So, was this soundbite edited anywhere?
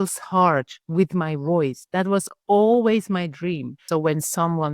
yes; 1 cut; at 3.8 s

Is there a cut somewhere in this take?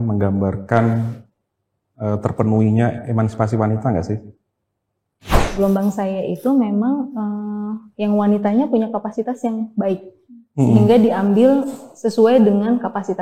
yes; 1 cut; at 5.4 s

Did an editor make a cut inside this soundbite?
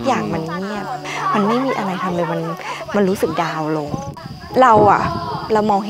yes; 2 cuts; at 1.0 s, 4.0 s

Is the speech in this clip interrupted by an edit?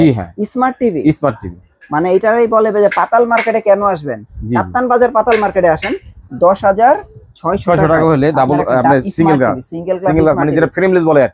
no; 0 cuts

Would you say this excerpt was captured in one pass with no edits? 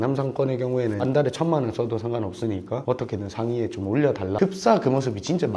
yes; 0 cuts

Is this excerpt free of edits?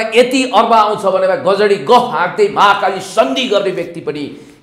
yes; 0 cuts

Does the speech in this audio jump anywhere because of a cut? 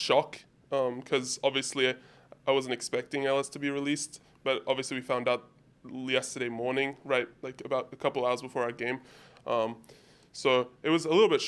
no; 0 cuts

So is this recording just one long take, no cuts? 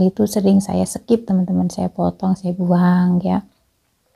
yes; 0 cuts

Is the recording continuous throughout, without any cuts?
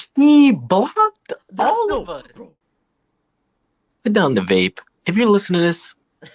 no; 1 cut; at 2.3 s

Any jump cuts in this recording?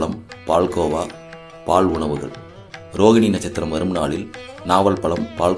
no; 0 cuts

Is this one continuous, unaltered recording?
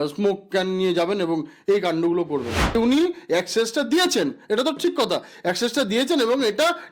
no; 1 cut; at 2.6 s

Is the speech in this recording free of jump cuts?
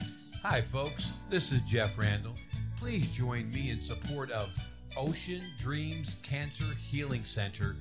yes; 0 cuts

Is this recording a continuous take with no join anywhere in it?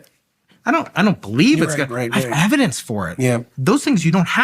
no; 1 cut; at 3.5 s

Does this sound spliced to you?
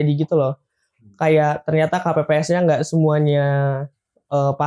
no; 0 cuts

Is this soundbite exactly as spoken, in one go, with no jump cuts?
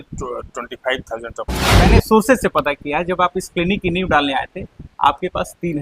no; 1 cut; at 1.9 s

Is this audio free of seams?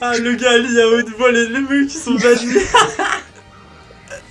yes; 0 cuts

